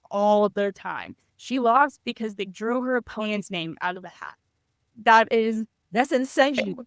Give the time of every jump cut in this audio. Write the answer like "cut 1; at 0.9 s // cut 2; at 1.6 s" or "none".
cut 1; at 4.8 s